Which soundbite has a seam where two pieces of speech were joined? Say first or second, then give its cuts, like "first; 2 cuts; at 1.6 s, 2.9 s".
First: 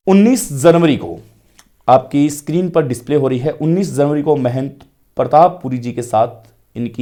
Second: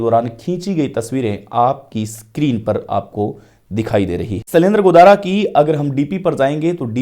second; 1 cut; at 4.4 s